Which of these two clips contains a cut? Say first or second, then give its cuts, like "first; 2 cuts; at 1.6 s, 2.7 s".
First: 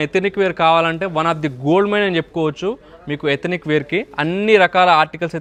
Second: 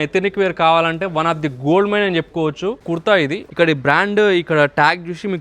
second; 1 cut; at 3.1 s